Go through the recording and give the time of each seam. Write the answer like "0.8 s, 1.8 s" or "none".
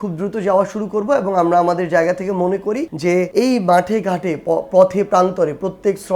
3.2 s